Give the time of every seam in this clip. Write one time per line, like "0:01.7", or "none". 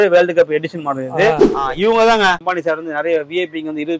0:01.5
0:02.4